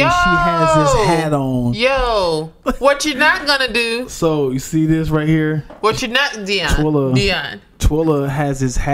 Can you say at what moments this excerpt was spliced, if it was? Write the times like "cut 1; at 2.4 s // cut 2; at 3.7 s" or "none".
cut 1; at 2.6 s